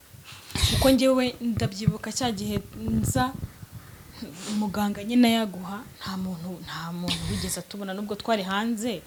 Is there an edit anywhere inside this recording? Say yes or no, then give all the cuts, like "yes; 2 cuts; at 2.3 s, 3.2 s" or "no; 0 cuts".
no; 0 cuts